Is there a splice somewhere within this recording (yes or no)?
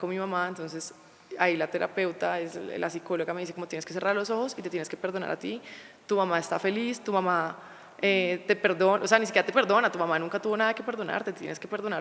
no